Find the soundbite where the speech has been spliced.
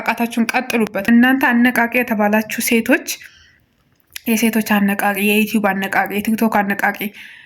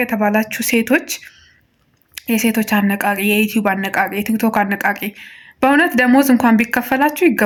first; 1 cut; at 1.0 s

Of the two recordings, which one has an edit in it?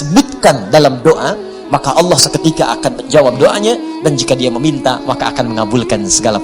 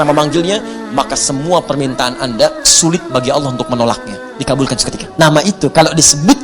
second; 1 cut; at 5.0 s

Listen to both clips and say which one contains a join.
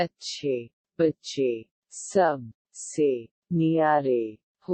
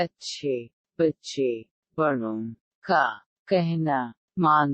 second; 1 cut; at 1.7 s

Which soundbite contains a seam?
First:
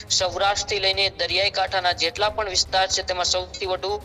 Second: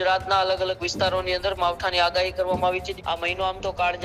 second; 1 cut; at 2.9 s

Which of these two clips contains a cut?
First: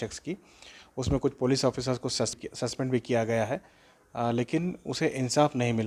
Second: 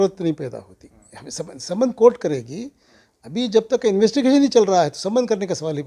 first; 1 cut; at 2.4 s

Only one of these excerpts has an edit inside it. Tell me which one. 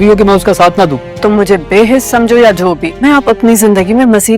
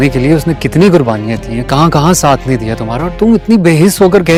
first; 2 cuts; at 1.1 s, 2.9 s

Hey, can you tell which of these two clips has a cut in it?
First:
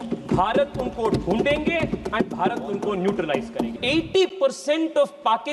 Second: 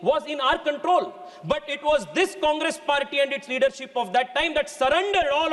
first; 1 cut; at 3.7 s

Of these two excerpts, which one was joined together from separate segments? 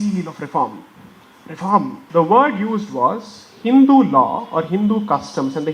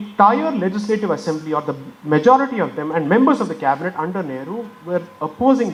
first; 1 cut; at 2.0 s

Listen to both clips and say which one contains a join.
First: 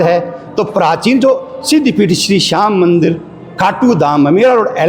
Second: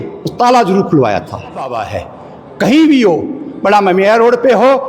second; 1 cut; at 1.7 s

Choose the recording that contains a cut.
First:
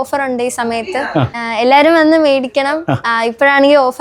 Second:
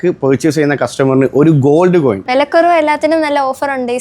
second; 1 cut; at 2.2 s

